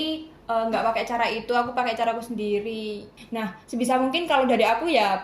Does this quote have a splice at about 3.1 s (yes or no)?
yes